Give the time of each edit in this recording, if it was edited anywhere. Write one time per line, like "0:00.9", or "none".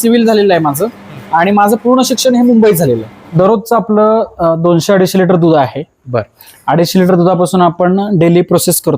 0:03.4